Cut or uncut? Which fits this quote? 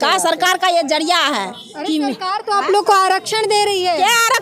uncut